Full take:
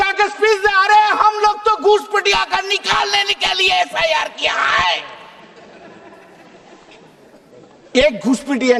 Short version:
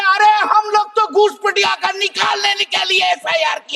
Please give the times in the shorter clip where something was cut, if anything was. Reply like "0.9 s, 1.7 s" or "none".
none